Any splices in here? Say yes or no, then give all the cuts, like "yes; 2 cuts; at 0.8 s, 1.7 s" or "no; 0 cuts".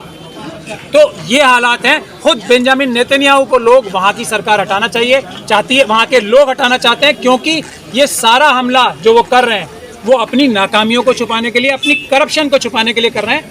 no; 0 cuts